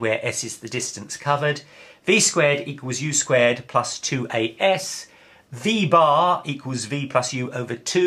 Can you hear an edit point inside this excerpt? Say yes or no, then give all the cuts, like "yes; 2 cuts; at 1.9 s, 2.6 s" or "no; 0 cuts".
no; 0 cuts